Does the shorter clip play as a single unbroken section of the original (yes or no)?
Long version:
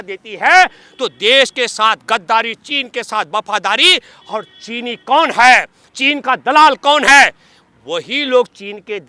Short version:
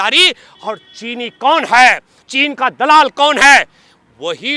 yes